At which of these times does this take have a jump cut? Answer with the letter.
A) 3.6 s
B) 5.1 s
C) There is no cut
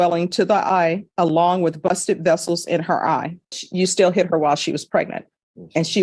A